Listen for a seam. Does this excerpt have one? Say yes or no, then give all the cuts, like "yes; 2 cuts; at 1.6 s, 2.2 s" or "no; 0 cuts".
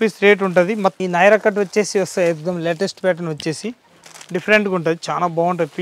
yes; 1 cut; at 0.9 s